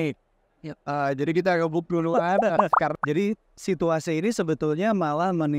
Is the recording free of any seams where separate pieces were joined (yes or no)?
no